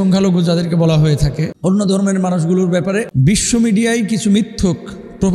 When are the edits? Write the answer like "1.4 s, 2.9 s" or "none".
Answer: 3.1 s